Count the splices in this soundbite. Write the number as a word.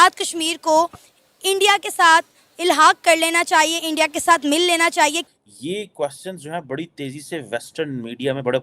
one